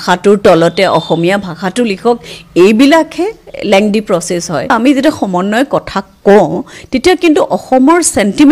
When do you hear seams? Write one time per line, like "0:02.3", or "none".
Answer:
0:04.7